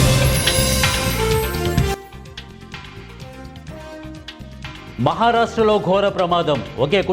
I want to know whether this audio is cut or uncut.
cut